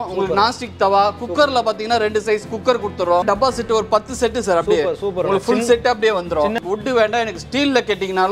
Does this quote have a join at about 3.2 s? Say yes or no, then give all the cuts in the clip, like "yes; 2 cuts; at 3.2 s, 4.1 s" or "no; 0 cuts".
yes; 2 cuts; at 3.2 s, 6.6 s